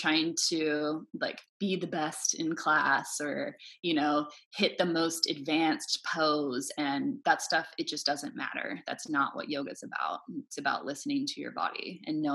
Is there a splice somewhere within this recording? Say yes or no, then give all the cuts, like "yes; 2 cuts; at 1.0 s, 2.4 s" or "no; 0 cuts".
no; 0 cuts